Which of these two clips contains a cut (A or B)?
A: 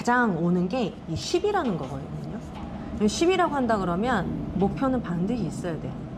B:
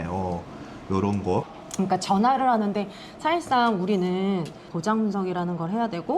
B